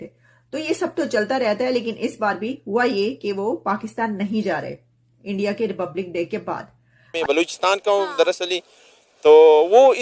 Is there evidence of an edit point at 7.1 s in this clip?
yes; 1 cut; at 7.1 s

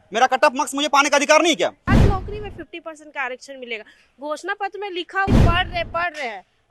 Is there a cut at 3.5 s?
no; 2 cuts; at 1.9 s, 5.3 s

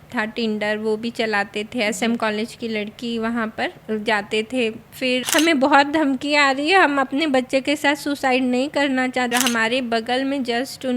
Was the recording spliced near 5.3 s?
yes; 2 cuts; at 5.3 s, 9.3 s

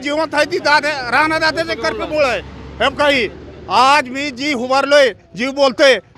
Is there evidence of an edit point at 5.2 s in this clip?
no; 0 cuts

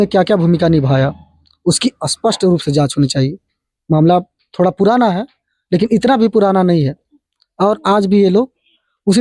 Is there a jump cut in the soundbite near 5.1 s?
no; 0 cuts

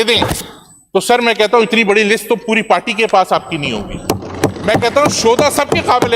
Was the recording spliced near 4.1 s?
no; 0 cuts

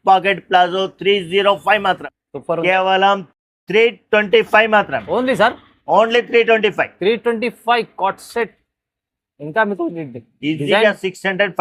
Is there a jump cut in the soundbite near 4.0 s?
no; 1 cut; at 2.2 s

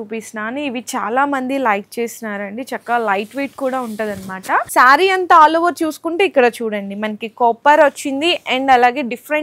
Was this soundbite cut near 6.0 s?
no; 1 cut; at 4.7 s

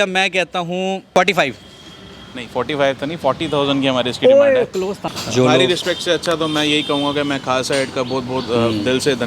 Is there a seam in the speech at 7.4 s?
no; 2 cuts; at 1.0 s, 5.0 s

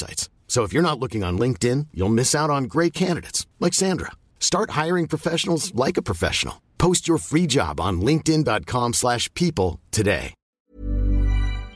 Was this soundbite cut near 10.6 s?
yes; 1 cut; at 10.6 s

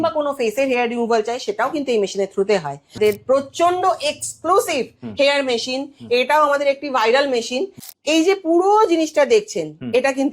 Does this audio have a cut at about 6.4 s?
no; 2 cuts; at 2.9 s, 7.8 s

